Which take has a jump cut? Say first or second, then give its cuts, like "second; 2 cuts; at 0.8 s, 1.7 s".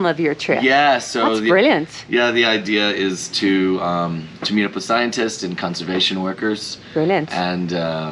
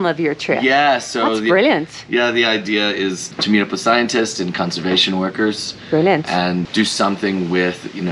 second; 2 cuts; at 3.3 s, 6.6 s